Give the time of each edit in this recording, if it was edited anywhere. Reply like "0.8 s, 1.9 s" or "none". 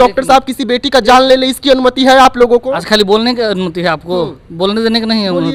none